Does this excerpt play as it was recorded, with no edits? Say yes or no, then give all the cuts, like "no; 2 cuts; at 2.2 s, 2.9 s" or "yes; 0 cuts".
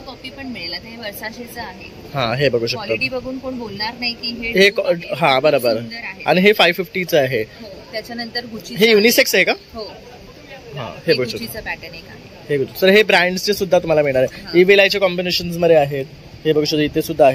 yes; 0 cuts